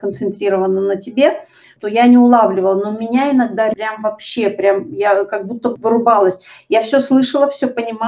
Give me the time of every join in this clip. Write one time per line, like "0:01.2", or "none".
0:03.8
0:05.8